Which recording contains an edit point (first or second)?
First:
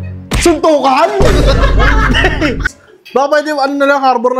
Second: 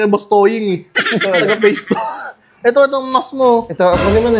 first